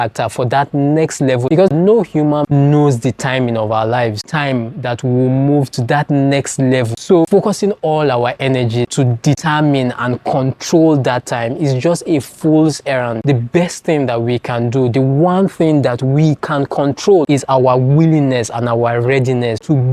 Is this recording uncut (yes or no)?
yes